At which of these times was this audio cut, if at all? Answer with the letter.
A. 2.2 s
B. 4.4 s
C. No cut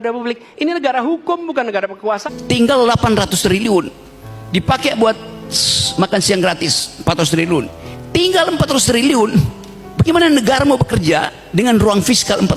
A